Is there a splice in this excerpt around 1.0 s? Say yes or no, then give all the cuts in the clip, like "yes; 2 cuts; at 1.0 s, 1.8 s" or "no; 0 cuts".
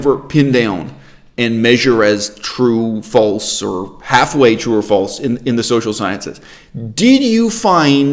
no; 0 cuts